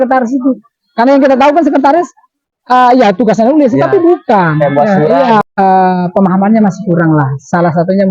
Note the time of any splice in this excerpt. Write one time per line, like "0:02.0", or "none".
0:05.4